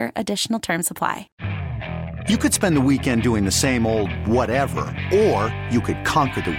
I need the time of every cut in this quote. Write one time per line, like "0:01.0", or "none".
0:01.4